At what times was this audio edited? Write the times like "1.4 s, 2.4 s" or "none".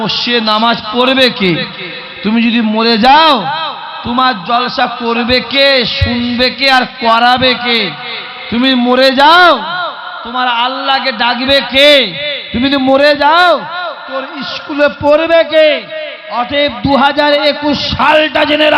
none